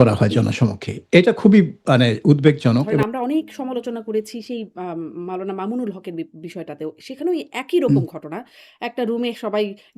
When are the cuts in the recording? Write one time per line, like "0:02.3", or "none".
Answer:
0:03.0